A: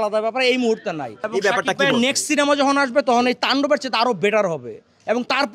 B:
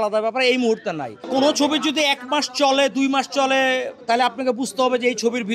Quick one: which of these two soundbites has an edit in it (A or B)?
B